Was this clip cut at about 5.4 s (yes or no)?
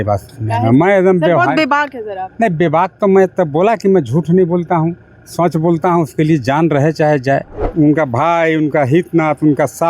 no